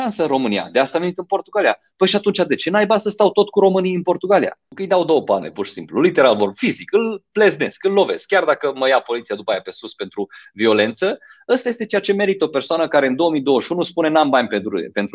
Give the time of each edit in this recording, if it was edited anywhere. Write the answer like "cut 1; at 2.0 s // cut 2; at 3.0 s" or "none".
cut 1; at 4.7 s